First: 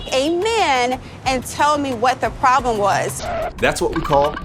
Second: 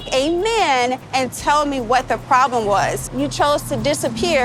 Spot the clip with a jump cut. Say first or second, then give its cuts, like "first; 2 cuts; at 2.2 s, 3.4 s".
second; 2 cuts; at 1.0 s, 3.1 s